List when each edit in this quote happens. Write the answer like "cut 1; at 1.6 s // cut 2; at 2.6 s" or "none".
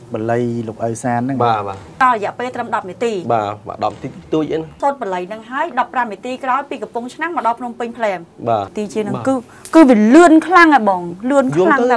cut 1; at 1.9 s // cut 2; at 4.7 s // cut 3; at 8.8 s